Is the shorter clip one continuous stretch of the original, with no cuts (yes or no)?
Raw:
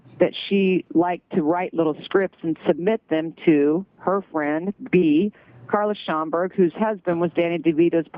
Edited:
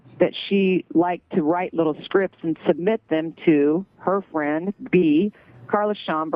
yes